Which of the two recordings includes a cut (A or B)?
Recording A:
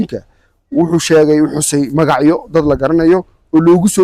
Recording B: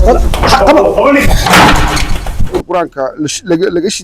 B